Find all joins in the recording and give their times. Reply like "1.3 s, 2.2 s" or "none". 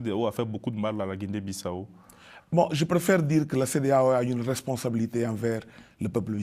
none